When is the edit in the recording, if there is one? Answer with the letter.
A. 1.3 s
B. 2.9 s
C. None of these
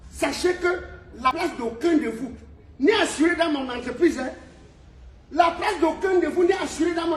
A